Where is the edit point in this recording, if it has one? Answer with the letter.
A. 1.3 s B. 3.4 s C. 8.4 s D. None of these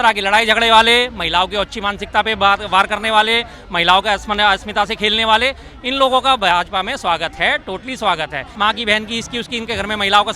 C